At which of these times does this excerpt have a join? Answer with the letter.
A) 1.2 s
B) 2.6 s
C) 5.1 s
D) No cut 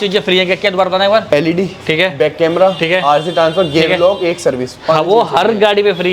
A